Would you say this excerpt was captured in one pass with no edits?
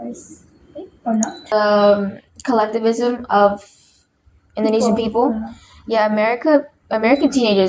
no; 1 cut; at 1.4 s

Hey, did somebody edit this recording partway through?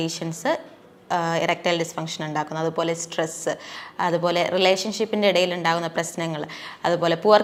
no; 0 cuts

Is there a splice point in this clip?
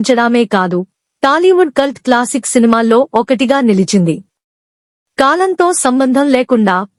no; 0 cuts

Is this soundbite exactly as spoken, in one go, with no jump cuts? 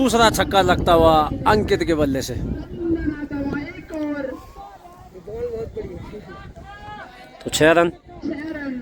yes; 0 cuts

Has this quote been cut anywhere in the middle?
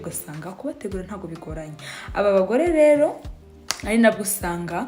no; 0 cuts

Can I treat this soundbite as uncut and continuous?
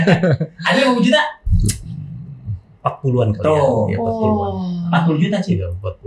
yes; 0 cuts

